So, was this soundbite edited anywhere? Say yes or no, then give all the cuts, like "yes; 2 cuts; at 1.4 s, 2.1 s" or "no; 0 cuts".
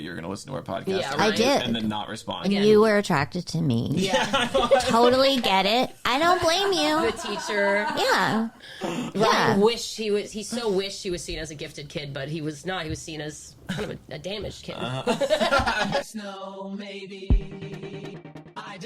yes; 2 cuts; at 2.3 s, 16.1 s